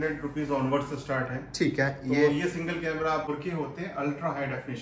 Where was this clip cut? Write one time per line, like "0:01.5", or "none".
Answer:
0:03.3